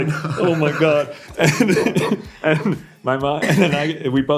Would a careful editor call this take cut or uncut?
uncut